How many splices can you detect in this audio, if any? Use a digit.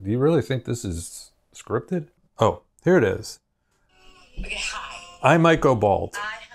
1